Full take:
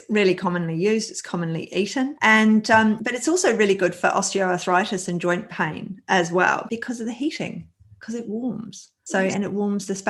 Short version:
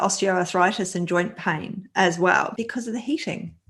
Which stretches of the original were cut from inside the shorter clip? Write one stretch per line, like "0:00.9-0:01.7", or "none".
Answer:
none